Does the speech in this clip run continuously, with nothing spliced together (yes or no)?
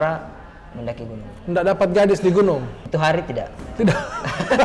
no